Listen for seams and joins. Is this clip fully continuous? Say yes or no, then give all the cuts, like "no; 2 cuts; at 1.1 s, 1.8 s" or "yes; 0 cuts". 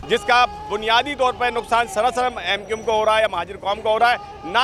yes; 0 cuts